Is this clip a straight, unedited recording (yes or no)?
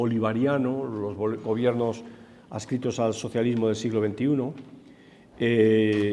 yes